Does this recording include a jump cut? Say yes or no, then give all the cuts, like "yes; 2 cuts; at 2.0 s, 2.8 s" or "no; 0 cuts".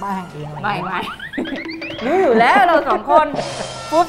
no; 0 cuts